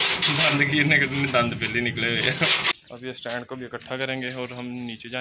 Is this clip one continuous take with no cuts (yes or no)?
no